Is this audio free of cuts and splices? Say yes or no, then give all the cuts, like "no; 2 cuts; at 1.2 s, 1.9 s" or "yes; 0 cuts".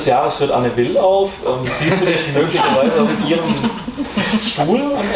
yes; 0 cuts